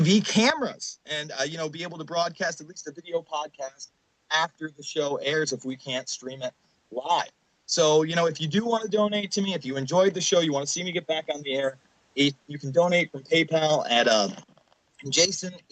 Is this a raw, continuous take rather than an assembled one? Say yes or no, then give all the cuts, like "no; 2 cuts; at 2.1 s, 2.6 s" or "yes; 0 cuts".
no; 1 cut; at 7.1 s